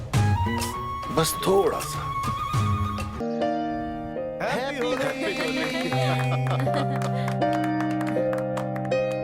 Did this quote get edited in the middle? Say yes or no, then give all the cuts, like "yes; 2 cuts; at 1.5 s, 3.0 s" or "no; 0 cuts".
yes; 1 cut; at 3.2 s